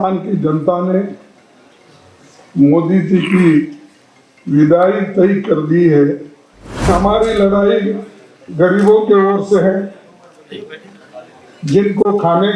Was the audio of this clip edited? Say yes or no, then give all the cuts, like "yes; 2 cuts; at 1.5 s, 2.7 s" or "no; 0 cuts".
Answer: yes; 1 cut; at 6.9 s